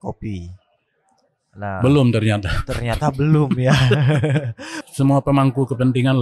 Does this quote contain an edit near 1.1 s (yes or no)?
no